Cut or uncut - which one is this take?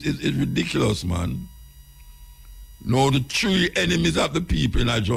uncut